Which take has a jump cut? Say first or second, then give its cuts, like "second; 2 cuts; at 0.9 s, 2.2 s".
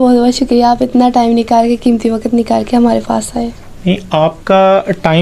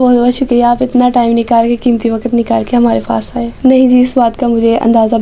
second; 1 cut; at 3.5 s